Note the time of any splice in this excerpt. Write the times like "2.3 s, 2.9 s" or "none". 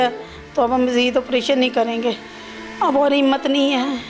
2.6 s